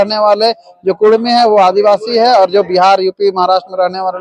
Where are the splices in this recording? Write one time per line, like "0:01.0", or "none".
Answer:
none